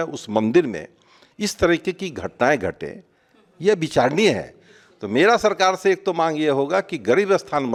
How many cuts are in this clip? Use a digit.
0